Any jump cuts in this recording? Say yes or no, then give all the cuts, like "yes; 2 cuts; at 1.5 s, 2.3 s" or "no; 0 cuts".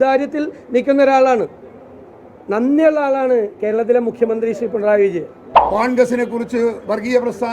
yes; 1 cut; at 5.5 s